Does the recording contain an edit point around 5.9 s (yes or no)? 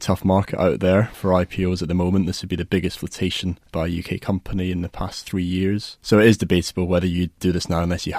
yes